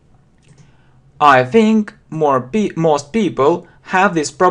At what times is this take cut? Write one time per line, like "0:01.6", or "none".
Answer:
0:01.9

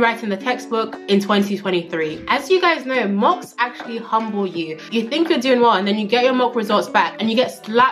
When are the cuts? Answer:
0:02.2

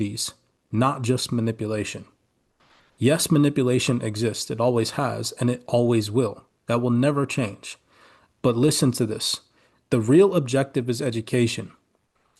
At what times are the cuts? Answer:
none

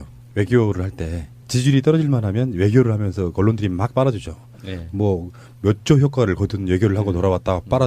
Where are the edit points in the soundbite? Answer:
none

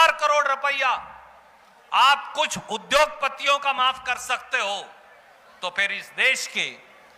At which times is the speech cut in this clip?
none

